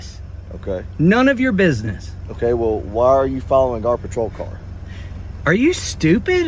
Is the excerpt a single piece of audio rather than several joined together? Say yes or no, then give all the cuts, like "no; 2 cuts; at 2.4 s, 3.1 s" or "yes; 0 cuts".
yes; 0 cuts